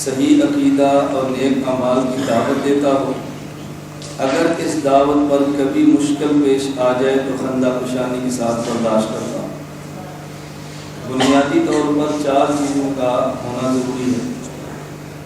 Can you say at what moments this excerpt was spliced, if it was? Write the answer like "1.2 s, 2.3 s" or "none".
none